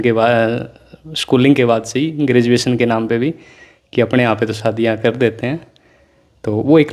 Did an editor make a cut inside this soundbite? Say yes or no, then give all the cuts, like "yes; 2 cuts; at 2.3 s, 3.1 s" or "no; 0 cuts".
no; 0 cuts